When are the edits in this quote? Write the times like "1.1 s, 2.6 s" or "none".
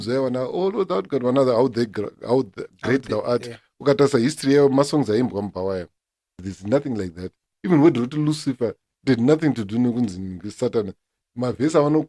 6.4 s